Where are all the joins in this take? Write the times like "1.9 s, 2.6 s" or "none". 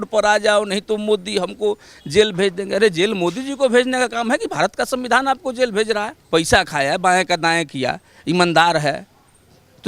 6.1 s